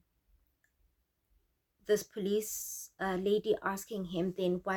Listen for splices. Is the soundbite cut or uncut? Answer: uncut